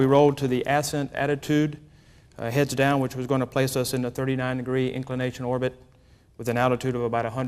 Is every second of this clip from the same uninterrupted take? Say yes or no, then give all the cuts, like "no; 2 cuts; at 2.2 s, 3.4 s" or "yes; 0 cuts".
no; 1 cut; at 6.1 s